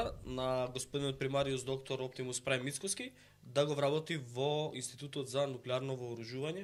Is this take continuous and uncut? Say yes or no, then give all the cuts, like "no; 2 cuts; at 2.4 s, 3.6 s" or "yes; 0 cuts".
yes; 0 cuts